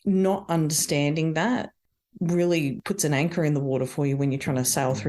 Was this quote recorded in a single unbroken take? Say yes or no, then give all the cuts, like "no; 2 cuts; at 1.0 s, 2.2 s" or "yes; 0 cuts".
no; 1 cut; at 2.8 s